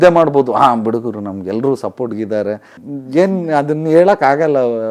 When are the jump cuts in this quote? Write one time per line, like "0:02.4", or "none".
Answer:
0:02.8